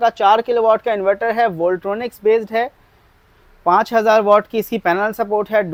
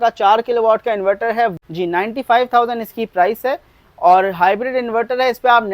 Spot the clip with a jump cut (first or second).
second